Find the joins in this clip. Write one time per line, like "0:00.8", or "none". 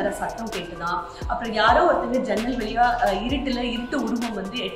none